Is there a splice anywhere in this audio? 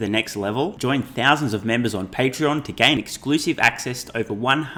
no; 0 cuts

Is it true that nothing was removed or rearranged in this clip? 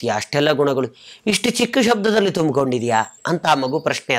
no; 1 cut; at 3.2 s

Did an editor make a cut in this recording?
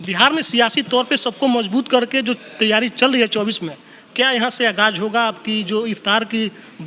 no; 0 cuts

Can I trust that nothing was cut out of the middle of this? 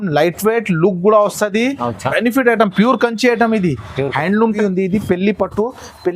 no; 1 cut; at 4.6 s

